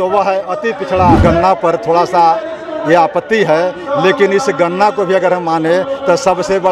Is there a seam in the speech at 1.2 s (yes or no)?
yes